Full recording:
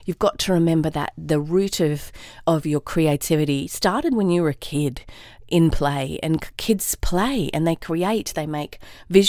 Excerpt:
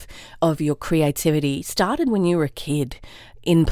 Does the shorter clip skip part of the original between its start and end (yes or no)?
no